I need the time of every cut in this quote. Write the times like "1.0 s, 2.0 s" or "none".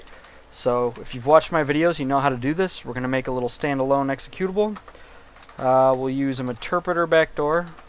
none